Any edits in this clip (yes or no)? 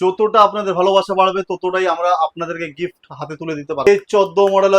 yes